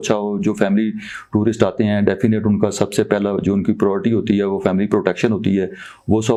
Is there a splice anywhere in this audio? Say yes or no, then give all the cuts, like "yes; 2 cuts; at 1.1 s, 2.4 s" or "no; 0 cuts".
no; 0 cuts